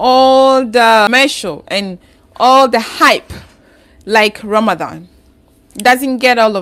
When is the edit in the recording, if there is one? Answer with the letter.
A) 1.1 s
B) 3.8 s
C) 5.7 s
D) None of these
D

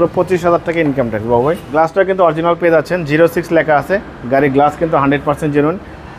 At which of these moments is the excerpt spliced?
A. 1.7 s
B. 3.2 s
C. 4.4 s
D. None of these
A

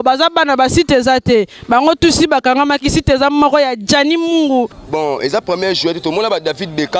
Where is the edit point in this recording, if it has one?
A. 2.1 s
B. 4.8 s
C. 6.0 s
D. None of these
B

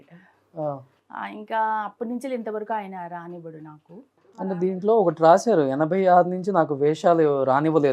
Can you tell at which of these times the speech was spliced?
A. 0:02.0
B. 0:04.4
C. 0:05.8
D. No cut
B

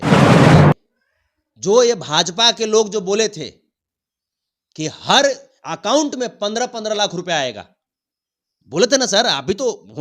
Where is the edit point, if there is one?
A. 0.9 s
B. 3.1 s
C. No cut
A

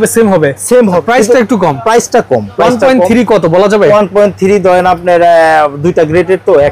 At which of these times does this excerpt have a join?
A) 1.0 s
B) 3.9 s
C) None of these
A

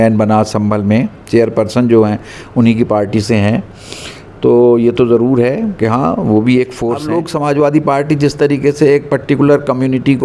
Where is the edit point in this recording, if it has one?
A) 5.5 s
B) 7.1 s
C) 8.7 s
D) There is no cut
B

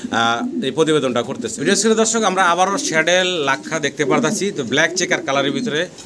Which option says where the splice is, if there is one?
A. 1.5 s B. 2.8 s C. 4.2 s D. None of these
A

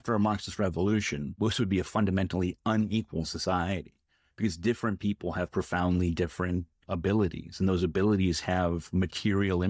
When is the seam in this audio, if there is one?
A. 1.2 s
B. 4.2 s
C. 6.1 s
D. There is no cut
A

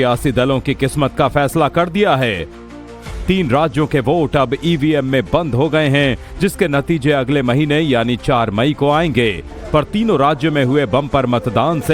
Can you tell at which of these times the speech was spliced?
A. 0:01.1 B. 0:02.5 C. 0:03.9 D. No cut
A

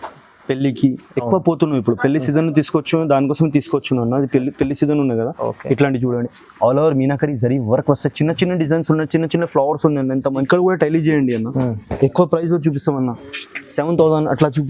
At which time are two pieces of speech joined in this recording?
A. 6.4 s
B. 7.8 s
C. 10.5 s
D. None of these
C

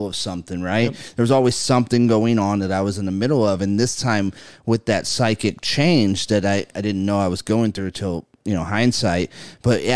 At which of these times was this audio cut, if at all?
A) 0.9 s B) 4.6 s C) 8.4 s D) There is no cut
D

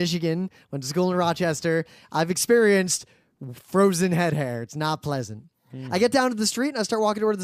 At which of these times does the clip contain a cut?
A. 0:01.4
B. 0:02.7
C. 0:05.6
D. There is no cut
A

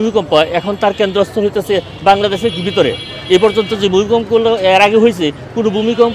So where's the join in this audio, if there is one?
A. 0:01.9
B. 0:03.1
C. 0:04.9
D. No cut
D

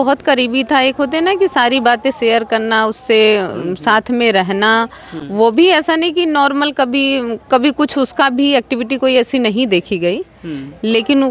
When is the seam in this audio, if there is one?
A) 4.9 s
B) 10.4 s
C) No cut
C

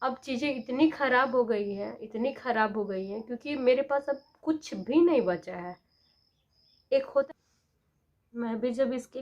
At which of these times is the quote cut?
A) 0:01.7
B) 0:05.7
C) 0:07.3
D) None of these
C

